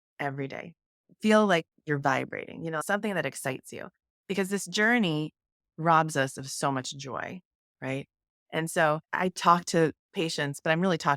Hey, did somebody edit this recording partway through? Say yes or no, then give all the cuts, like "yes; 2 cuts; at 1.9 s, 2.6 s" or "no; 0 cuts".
yes; 2 cuts; at 2.8 s, 9.1 s